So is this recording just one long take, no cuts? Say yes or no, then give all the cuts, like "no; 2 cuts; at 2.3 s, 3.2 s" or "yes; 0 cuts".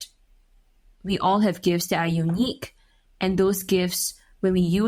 yes; 0 cuts